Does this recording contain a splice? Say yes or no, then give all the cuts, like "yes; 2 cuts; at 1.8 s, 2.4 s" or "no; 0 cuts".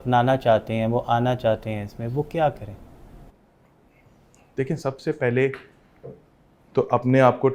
no; 0 cuts